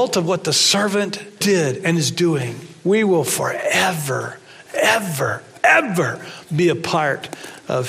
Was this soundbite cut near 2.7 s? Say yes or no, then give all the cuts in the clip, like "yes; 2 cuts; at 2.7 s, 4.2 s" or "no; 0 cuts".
yes; 2 cuts; at 1.4 s, 2.7 s